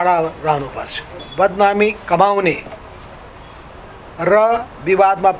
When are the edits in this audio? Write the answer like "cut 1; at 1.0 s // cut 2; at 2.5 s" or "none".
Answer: cut 1; at 1.2 s